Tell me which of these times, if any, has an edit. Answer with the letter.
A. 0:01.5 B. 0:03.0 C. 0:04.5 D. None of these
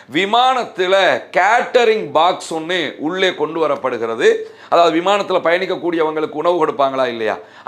D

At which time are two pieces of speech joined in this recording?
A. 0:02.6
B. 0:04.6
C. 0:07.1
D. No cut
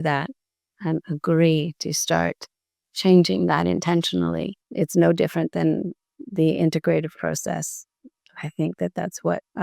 B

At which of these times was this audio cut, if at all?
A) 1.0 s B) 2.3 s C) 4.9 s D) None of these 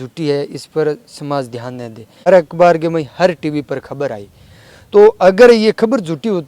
B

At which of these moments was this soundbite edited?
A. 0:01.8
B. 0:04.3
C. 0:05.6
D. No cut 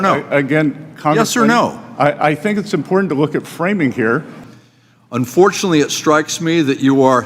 B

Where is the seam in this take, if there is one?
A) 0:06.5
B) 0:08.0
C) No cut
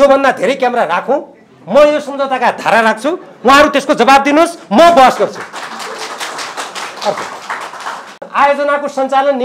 C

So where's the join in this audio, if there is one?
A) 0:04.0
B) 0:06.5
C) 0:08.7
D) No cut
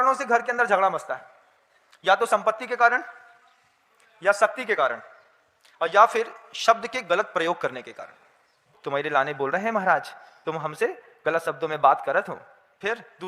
C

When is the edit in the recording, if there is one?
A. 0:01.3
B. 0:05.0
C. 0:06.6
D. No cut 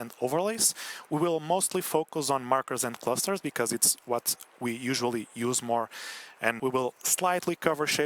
C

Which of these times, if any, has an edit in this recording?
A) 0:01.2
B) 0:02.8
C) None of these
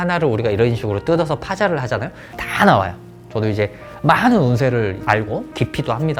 C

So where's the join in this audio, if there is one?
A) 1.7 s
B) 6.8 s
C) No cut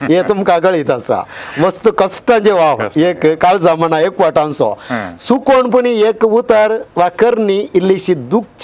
C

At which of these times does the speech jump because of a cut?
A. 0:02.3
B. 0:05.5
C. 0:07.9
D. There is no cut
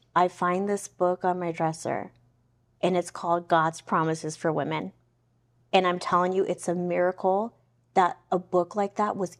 D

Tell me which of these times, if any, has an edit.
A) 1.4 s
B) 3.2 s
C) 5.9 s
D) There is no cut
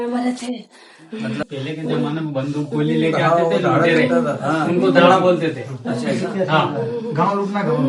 A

